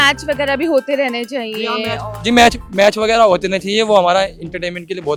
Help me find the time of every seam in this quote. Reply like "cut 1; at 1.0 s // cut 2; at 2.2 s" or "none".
none

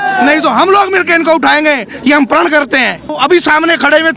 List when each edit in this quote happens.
cut 1; at 3.1 s

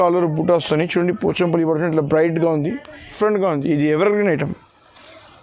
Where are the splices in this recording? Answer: cut 1; at 3.1 s

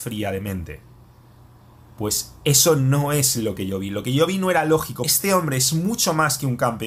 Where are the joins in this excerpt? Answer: cut 1; at 5.1 s

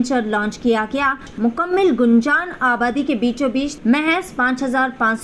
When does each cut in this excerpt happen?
cut 1; at 1.3 s // cut 2; at 3.7 s

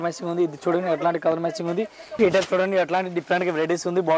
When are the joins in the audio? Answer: cut 1; at 2.0 s

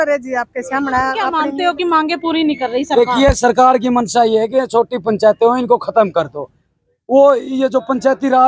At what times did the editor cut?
cut 1; at 1.3 s

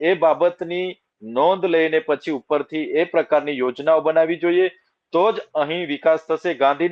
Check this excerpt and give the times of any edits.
none

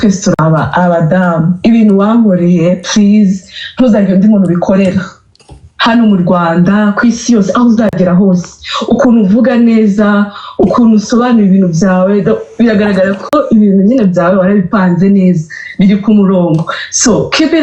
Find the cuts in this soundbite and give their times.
none

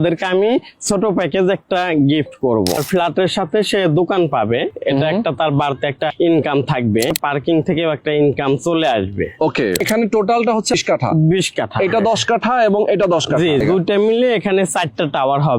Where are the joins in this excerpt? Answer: cut 1; at 2.8 s // cut 2; at 6.1 s // cut 3; at 7.1 s // cut 4; at 9.8 s // cut 5; at 10.7 s // cut 6; at 13.6 s

